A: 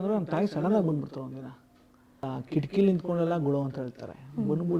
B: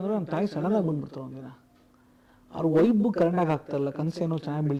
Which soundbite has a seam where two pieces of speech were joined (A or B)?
A